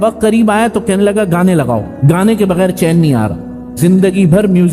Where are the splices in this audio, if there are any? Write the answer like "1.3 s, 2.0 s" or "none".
1.9 s, 3.8 s